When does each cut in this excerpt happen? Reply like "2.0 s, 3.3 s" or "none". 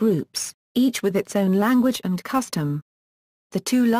1.4 s